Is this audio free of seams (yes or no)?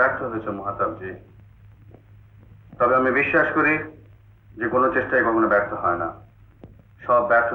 yes